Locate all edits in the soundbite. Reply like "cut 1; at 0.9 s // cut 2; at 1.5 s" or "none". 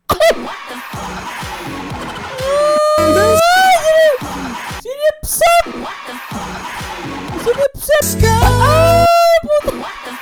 none